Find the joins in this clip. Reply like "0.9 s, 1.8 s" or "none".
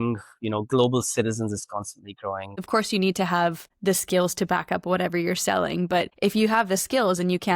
2.6 s, 3.7 s, 6.1 s